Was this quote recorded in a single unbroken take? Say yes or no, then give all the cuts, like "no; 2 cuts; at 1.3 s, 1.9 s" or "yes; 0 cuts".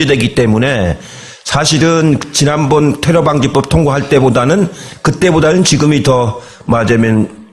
yes; 0 cuts